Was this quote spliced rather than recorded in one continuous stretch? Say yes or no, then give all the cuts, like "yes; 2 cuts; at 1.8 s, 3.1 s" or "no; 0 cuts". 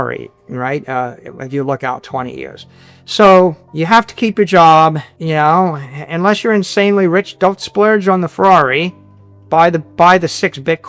yes; 2 cuts; at 3.7 s, 5.1 s